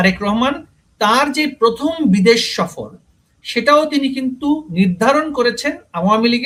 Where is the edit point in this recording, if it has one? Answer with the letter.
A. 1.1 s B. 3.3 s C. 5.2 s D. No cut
D